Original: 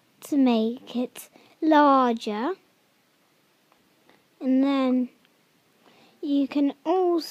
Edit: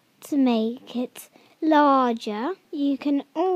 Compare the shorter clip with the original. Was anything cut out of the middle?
yes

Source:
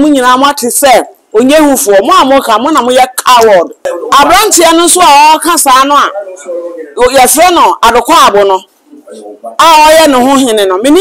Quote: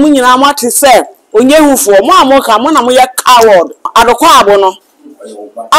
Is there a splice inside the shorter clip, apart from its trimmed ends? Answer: yes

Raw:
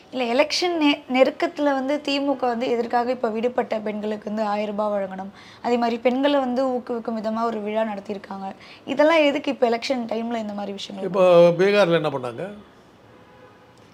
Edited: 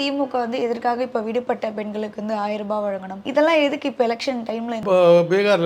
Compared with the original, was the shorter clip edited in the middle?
yes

